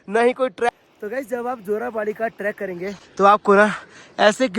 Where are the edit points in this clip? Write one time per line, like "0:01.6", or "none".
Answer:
0:00.7
0:03.0